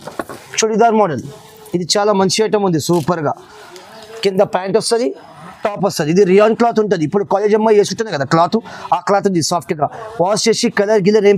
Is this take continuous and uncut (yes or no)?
yes